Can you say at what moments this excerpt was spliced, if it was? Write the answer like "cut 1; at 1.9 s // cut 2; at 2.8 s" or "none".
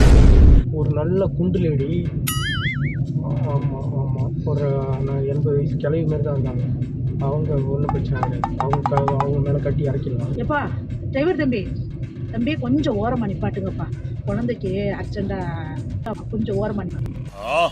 cut 1; at 10.4 s